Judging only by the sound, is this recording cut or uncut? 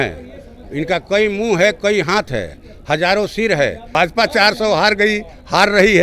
cut